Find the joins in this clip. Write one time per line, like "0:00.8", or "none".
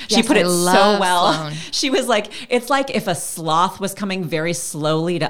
none